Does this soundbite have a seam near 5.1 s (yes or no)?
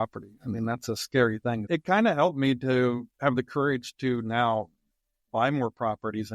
no